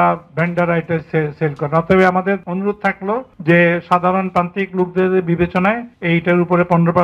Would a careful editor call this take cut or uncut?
cut